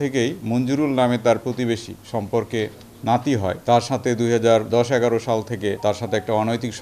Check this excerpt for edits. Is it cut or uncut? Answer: cut